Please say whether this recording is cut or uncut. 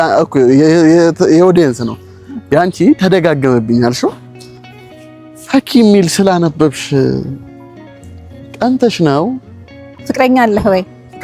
cut